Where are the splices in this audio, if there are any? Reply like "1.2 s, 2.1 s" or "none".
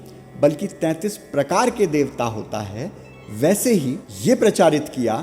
4.0 s